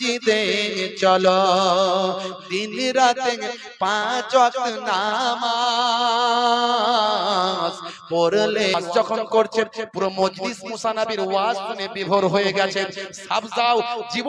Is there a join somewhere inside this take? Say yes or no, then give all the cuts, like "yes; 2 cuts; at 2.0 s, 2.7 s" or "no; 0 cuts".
yes; 1 cut; at 8.8 s